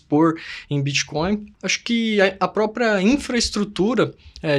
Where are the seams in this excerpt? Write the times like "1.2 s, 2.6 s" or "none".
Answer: 1.5 s